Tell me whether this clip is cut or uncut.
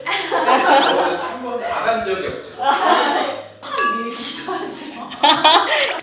cut